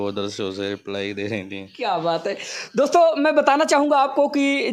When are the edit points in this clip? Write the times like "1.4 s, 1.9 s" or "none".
none

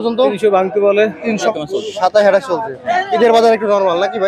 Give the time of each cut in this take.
1.5 s

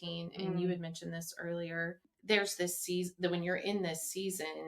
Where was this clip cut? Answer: 2.1 s

